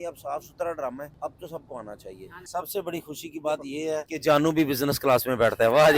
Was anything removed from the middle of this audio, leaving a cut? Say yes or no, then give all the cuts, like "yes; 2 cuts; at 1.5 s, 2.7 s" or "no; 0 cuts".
yes; 3 cuts; at 1.1 s, 2.3 s, 4.1 s